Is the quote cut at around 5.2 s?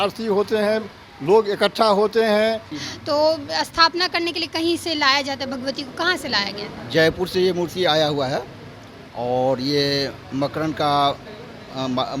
no; 1 cut; at 2.8 s

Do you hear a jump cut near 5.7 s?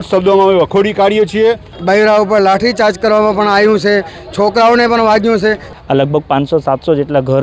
yes; 2 cuts; at 1.7 s, 5.7 s

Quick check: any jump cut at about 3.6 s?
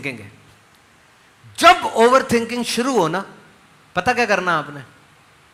no; 0 cuts

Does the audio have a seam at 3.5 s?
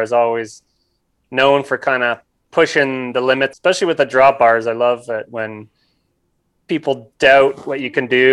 yes; 1 cut; at 3.5 s

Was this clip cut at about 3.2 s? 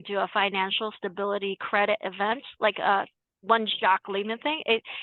no; 0 cuts

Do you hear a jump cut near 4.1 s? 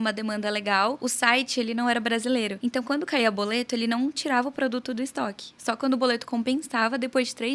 no; 2 cuts; at 1.0 s, 2.5 s

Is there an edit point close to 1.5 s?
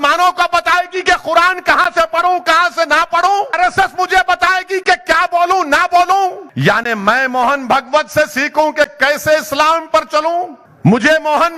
no; 3 cuts; at 3.5 s, 6.5 s, 10.6 s

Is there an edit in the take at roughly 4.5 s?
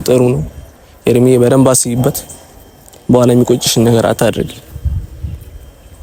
no; 0 cuts

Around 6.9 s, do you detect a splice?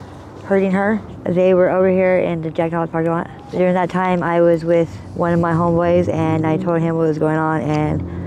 no; 3 cuts; at 1.1 s, 3.4 s, 5.0 s

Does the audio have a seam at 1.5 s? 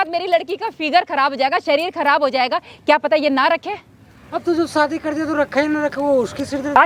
no; 0 cuts

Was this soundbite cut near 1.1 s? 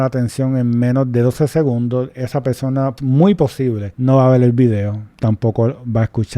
no; 3 cuts; at 2.9 s, 3.9 s, 5.0 s

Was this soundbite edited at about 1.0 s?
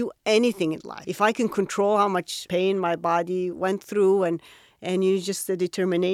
yes; 2 cuts; at 1.0 s, 2.3 s

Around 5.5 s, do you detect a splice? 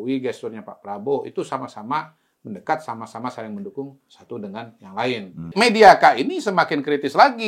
yes; 1 cut; at 5.5 s

